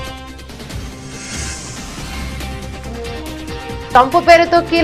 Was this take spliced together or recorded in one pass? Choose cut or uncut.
cut